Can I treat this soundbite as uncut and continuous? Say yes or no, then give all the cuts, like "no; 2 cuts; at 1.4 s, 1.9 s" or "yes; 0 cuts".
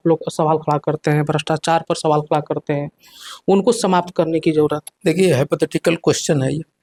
yes; 0 cuts